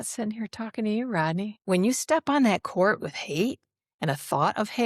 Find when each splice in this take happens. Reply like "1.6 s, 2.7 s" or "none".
1.6 s

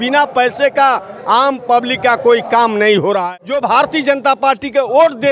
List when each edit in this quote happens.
3.2 s

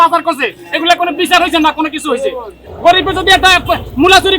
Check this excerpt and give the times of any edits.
2.6 s

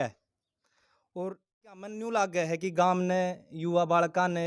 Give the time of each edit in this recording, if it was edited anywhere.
2.0 s

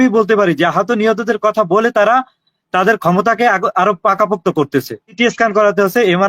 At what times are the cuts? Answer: 5.2 s

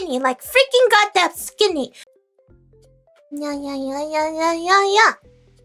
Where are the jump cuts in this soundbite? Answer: 2.0 s

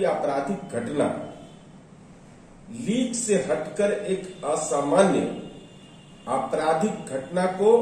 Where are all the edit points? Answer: none

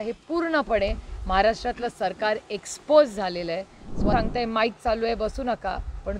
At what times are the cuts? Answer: 4.1 s

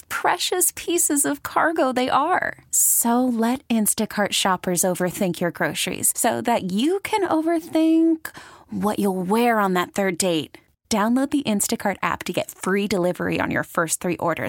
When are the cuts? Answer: none

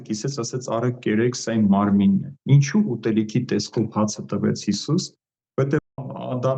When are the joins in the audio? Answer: none

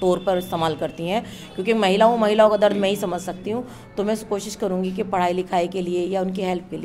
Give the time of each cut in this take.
1.4 s

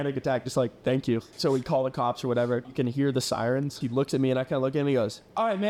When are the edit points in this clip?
1.3 s, 2.7 s, 3.8 s

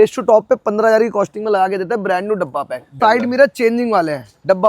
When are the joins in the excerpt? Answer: 2.9 s

